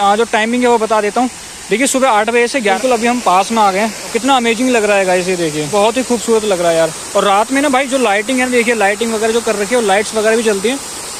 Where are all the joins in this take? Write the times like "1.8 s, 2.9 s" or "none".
2.8 s, 4.1 s, 5.6 s